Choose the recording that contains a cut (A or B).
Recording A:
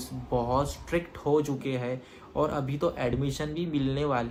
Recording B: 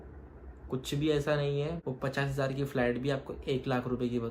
B